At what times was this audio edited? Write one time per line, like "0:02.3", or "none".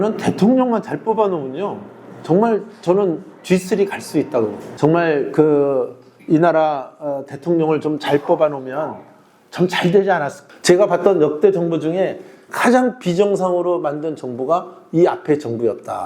0:04.6
0:10.4

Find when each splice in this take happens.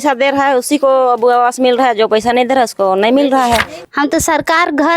0:03.8

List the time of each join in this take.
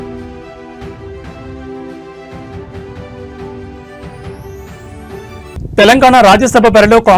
0:05.5

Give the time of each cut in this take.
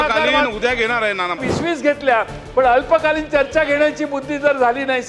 0:01.4

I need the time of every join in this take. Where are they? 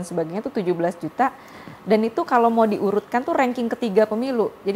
none

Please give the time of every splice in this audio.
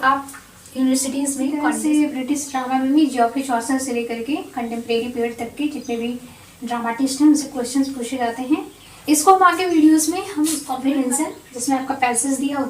0:01.6
0:10.7

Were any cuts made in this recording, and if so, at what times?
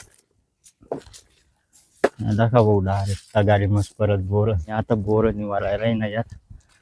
0:04.7

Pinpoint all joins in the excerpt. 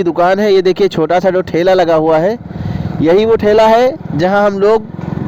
none

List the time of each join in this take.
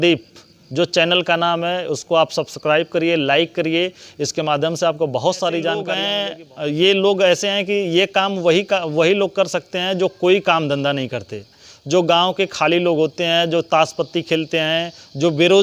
0:06.1

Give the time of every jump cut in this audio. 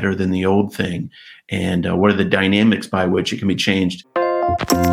0:04.0

